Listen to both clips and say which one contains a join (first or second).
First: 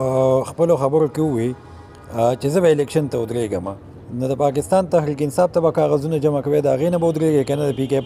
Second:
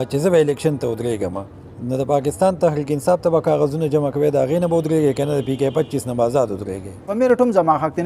second